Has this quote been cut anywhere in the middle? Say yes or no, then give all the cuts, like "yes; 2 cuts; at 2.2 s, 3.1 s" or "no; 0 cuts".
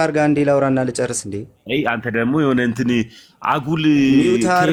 no; 0 cuts